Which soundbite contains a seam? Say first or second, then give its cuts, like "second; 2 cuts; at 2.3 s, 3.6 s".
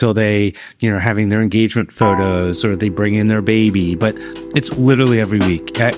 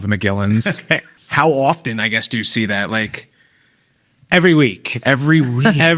second; 1 cut; at 1.2 s